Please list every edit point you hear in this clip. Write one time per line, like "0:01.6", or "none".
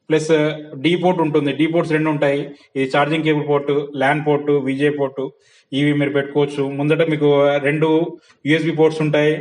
none